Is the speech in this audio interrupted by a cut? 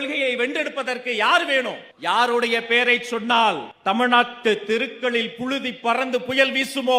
no; 0 cuts

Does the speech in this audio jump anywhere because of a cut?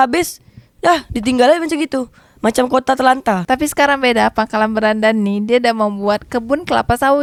no; 0 cuts

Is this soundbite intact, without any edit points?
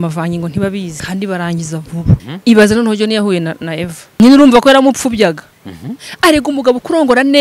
no; 3 cuts; at 1.0 s, 2.3 s, 4.2 s

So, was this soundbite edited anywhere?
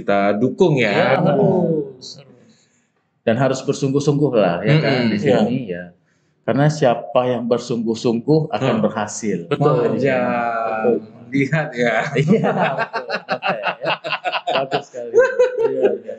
no; 0 cuts

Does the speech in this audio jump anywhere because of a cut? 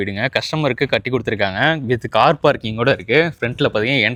no; 0 cuts

